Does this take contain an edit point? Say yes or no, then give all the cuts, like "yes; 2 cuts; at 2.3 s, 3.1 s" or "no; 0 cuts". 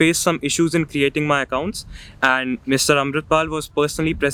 no; 0 cuts